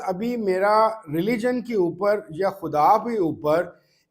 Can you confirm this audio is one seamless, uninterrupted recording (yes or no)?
yes